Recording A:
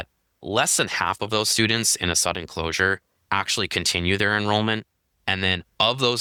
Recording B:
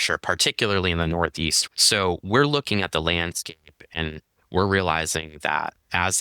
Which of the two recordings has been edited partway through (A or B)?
B